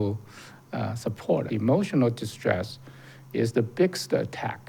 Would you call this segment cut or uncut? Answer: cut